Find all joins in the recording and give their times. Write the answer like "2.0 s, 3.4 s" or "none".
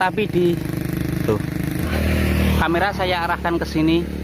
none